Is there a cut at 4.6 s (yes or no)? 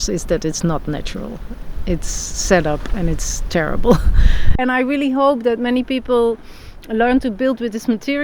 yes